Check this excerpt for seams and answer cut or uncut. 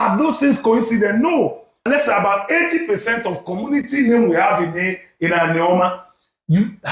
cut